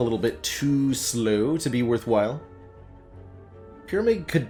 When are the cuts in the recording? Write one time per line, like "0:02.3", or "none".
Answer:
none